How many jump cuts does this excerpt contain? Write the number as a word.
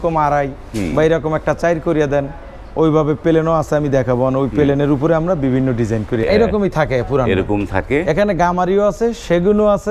one